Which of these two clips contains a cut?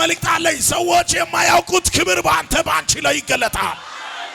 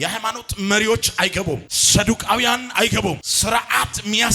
second; 2 cuts; at 1.7 s, 3.3 s

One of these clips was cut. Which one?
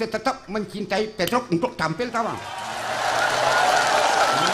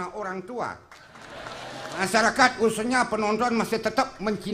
second; 1 cut; at 2.0 s

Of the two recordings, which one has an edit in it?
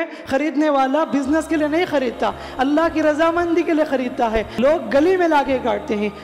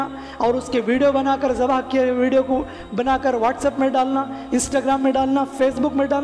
first; 1 cut; at 4.5 s

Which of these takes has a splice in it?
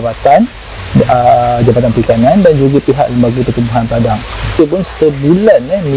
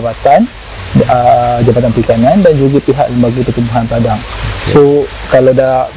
first; 1 cut; at 4.6 s

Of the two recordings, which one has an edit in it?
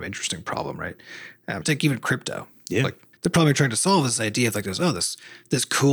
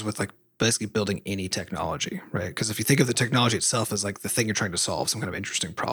first; 2 cuts; at 1.6 s, 3.0 s

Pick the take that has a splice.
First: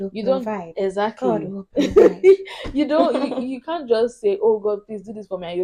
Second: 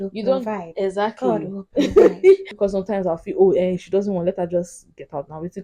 second; 1 cut; at 2.5 s

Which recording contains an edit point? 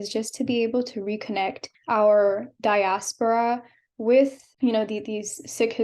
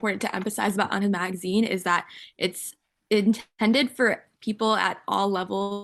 first; 2 cuts; at 1.7 s, 4.4 s

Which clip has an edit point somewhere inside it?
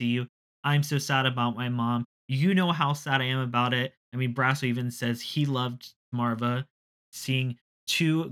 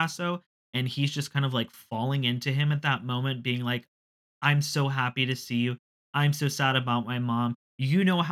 first; 2 cuts; at 6.1 s, 7.0 s

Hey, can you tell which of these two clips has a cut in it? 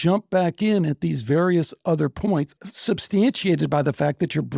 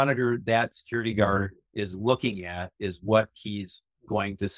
first; 1 cut; at 2.6 s

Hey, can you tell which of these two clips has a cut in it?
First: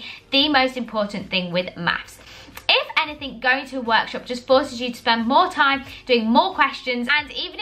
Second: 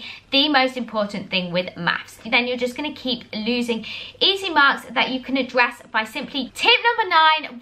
second; 2 cuts; at 2.2 s, 6.5 s

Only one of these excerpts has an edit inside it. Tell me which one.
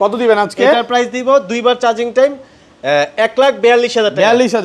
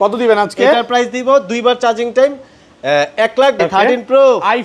second; 1 cut; at 3.6 s

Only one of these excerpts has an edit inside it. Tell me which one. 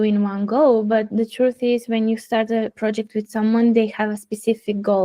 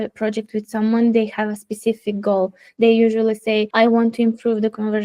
second; 1 cut; at 3.7 s

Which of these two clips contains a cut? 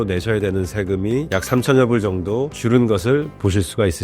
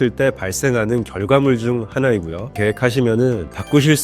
second; 1 cut; at 2.6 s

